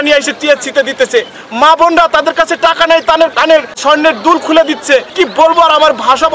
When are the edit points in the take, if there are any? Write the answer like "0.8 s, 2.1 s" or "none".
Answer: 3.8 s, 5.1 s